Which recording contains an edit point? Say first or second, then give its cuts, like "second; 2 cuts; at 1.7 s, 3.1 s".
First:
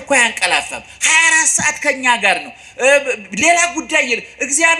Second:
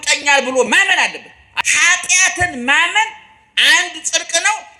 second; 1 cut; at 1.5 s